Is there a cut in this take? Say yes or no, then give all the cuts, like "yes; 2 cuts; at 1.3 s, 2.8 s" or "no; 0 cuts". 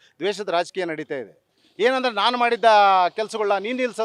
no; 0 cuts